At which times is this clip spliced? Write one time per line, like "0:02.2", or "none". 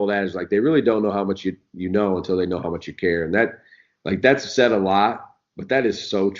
none